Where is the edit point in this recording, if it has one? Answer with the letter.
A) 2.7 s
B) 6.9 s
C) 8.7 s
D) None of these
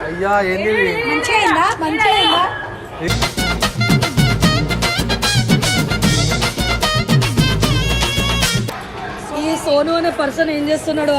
C